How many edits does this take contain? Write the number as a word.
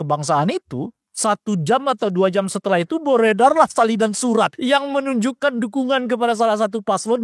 two